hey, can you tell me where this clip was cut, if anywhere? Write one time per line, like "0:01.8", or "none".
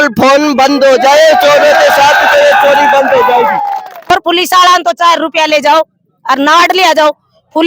0:04.1